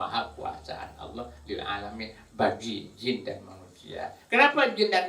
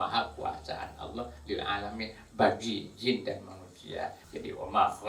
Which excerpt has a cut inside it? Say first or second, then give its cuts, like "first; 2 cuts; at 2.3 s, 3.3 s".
second; 1 cut; at 4.2 s